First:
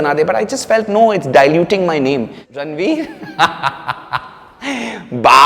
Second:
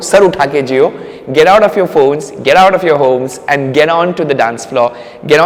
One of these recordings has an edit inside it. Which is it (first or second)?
first